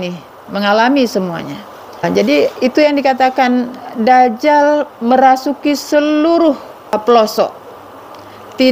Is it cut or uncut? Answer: cut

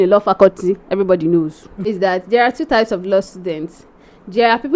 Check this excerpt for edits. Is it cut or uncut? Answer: cut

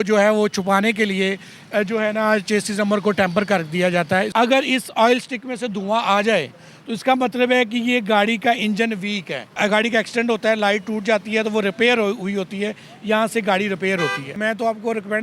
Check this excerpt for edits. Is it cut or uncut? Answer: cut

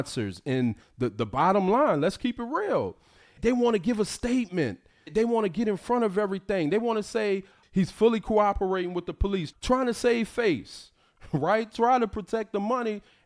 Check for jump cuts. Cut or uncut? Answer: cut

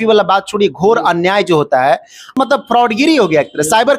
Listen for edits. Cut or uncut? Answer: cut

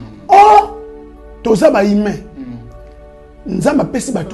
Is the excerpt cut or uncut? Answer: uncut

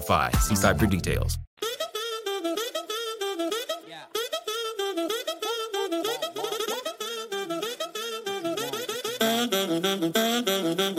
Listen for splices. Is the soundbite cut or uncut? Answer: cut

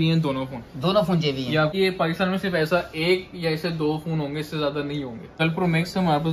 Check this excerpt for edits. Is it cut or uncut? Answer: cut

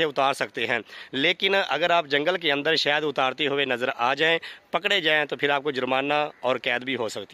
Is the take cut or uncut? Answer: uncut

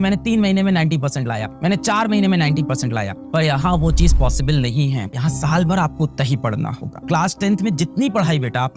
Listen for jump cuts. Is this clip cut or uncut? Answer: cut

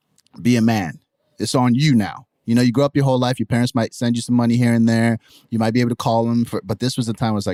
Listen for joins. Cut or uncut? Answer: uncut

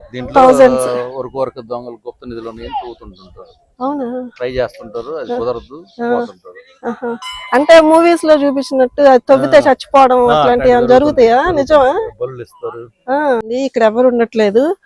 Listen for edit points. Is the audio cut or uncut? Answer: cut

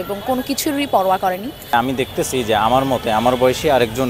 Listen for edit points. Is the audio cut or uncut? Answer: cut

